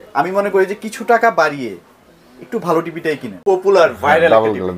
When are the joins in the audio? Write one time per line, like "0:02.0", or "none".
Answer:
0:03.3